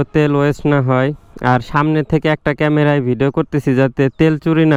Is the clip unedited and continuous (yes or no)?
yes